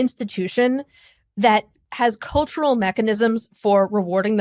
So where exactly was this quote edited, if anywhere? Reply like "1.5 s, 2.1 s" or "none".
1.8 s